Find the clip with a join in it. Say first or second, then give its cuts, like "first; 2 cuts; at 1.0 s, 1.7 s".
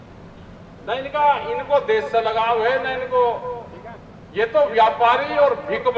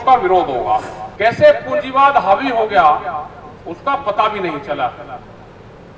second; 1 cut; at 1.0 s